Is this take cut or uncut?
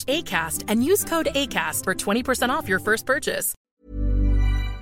cut